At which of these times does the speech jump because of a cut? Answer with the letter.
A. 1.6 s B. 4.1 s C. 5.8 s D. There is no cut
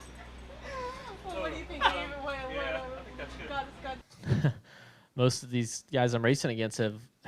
B